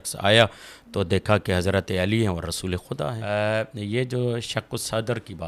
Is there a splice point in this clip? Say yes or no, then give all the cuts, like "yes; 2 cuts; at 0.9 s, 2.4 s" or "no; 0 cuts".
yes; 1 cut; at 3.2 s